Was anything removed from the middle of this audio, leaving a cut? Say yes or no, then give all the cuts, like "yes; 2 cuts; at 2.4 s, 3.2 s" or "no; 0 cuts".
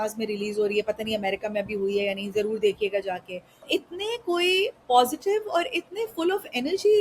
yes; 1 cut; at 3.6 s